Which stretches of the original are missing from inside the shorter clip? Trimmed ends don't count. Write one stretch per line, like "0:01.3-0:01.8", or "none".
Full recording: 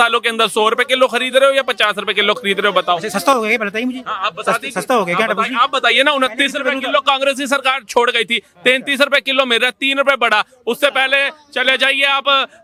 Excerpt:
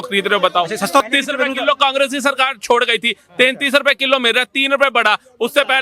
0:03.4-0:06.3

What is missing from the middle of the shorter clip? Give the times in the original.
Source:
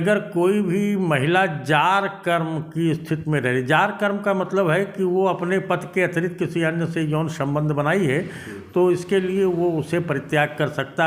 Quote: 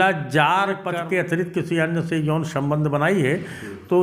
0:02.4-0:05.9

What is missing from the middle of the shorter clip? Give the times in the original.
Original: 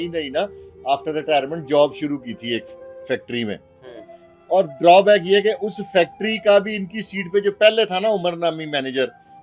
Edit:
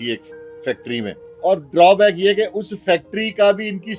0:03.7-0:04.3

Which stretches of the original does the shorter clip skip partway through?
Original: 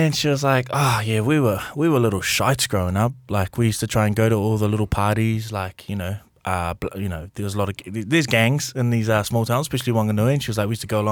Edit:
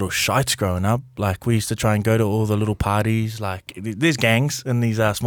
0:05.8-0:07.8

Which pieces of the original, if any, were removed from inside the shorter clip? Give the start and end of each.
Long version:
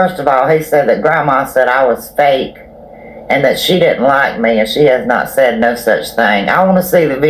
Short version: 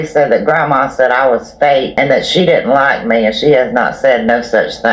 0:02.5-0:03.2

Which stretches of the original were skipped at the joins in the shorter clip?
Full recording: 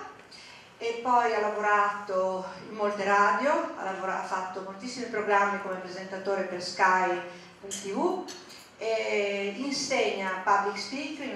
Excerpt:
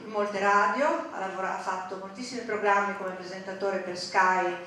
none

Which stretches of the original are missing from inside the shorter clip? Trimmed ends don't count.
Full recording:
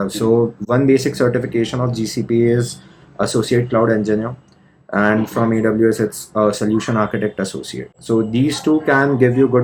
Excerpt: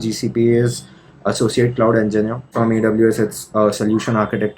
0:04.4-0:05.3

